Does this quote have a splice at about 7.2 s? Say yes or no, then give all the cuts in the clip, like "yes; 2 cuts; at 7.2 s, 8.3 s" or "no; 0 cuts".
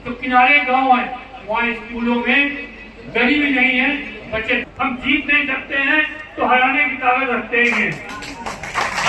no; 1 cut; at 4.6 s